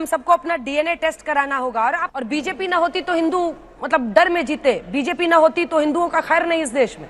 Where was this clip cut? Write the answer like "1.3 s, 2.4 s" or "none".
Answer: 2.1 s